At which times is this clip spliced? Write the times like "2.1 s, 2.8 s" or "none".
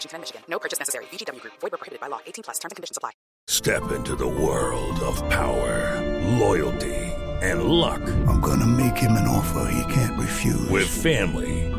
3.5 s